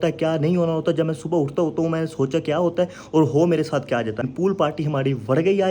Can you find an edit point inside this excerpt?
yes; 1 cut; at 4.2 s

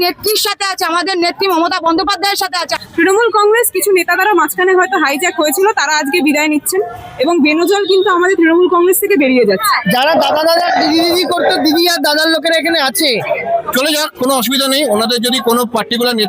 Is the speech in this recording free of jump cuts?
no; 3 cuts; at 2.8 s, 9.7 s, 13.3 s

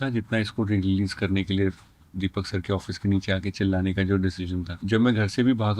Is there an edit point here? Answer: yes; 1 cut; at 4.7 s

